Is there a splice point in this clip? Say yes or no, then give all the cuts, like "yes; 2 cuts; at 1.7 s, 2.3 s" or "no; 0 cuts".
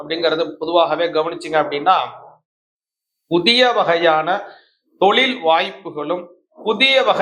no; 0 cuts